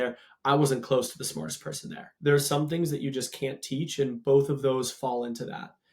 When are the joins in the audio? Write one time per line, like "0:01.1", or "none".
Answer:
0:02.1